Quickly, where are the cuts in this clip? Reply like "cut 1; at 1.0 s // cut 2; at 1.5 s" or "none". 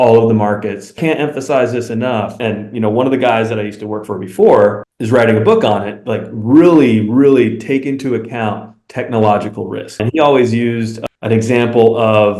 cut 1; at 1.0 s // cut 2; at 2.3 s // cut 3; at 10.0 s